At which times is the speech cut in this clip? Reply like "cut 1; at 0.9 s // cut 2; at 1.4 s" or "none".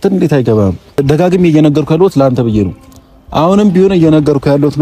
cut 1; at 1.0 s